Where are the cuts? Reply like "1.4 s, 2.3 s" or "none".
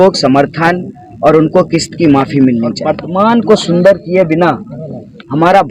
2.9 s